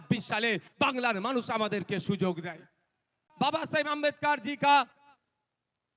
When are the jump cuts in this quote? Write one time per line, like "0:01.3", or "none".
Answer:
0:03.2